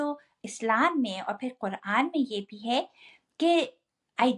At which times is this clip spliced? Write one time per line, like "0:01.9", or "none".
none